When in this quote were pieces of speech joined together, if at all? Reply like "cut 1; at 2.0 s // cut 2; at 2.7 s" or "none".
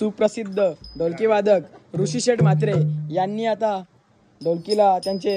none